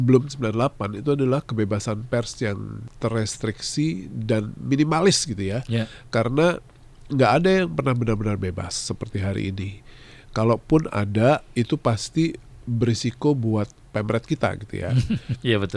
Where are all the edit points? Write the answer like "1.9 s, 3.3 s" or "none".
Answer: 2.9 s